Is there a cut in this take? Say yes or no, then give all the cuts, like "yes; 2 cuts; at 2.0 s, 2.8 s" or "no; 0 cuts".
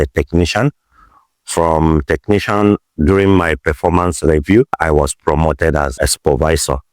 yes; 3 cuts; at 2.8 s, 4.8 s, 5.9 s